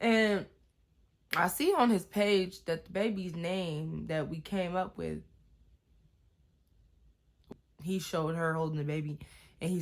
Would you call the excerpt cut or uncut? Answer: cut